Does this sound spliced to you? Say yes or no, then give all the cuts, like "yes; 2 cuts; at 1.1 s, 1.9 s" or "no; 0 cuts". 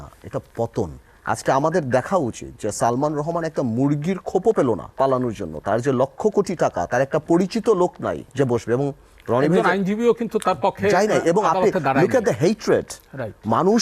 yes; 3 cuts; at 1.1 s, 4.9 s, 8.2 s